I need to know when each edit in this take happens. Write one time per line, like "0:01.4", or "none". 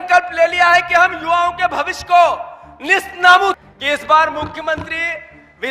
0:03.6